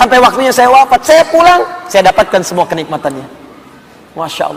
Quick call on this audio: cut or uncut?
uncut